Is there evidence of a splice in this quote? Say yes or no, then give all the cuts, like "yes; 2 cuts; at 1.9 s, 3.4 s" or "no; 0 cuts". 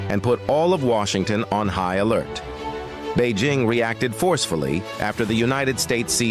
no; 0 cuts